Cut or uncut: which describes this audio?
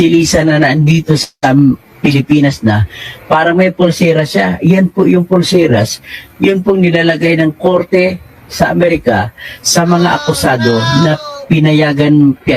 uncut